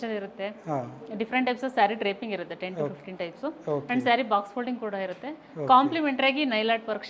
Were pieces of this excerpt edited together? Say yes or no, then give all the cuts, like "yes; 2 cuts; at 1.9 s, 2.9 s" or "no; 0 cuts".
no; 0 cuts